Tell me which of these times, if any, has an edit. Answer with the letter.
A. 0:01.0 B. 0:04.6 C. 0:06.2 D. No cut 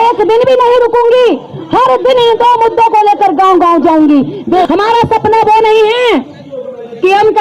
B